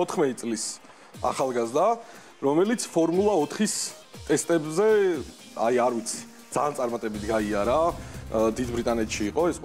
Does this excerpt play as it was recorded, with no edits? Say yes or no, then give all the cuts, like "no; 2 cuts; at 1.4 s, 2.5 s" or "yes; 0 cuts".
yes; 0 cuts